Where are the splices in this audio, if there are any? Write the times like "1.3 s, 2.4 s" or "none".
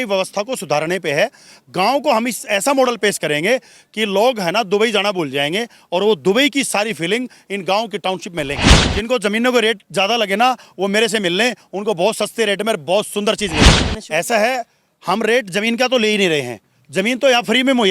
8.9 s, 13.9 s